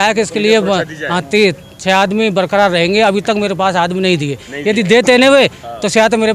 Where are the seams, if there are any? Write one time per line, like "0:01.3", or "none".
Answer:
none